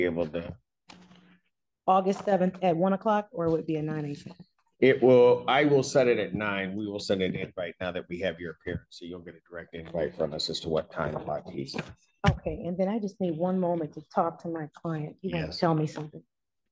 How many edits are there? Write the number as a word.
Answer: zero